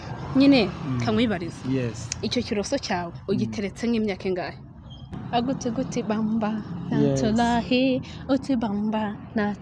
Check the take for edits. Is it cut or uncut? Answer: cut